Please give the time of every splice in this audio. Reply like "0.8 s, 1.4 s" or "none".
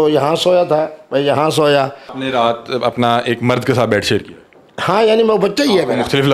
2.2 s